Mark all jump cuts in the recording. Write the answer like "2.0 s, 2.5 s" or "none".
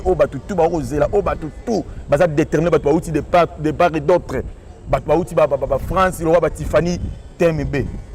none